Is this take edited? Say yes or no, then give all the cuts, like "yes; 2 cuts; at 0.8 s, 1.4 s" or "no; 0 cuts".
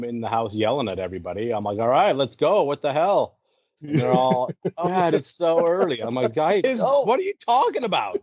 no; 0 cuts